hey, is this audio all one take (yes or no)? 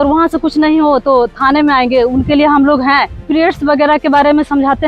no